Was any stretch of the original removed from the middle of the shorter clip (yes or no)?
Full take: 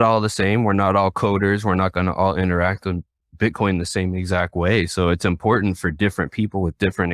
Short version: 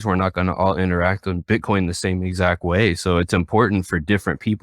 yes